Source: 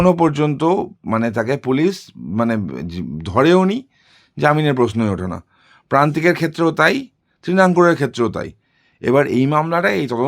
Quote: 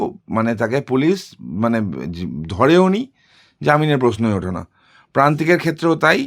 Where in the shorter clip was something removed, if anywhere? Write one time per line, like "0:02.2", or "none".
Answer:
none